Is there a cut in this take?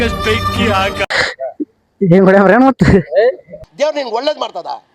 yes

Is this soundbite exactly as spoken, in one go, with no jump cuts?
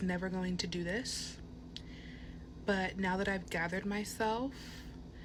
yes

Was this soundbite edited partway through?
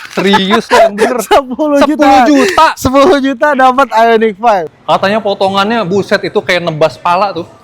yes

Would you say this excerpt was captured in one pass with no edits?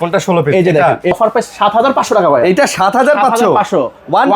no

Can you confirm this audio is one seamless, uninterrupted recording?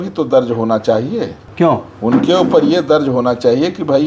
no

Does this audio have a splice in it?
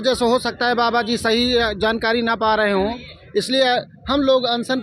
no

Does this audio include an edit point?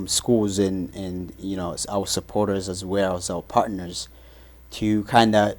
no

